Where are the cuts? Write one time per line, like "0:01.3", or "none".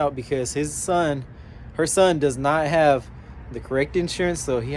none